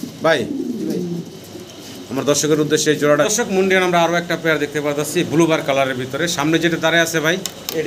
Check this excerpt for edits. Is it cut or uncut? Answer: cut